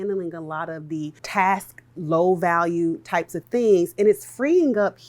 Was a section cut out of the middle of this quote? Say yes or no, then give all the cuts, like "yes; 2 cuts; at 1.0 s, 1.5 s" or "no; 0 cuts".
yes; 1 cut; at 1.2 s